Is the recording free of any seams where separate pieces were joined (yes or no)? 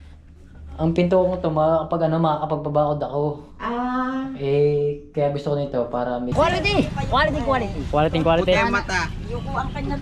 no